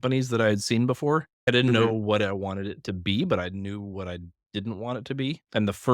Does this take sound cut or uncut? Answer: cut